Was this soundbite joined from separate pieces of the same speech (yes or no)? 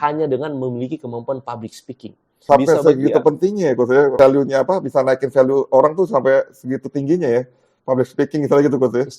yes